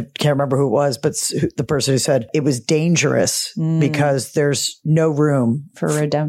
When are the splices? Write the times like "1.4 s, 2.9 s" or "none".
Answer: 2.3 s